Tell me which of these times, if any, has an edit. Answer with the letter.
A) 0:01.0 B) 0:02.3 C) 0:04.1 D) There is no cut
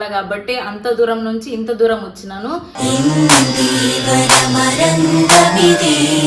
D